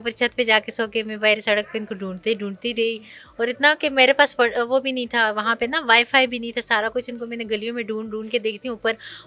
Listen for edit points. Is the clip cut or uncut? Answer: uncut